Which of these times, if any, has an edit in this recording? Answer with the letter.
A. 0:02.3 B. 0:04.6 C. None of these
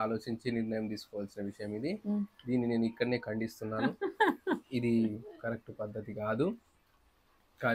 C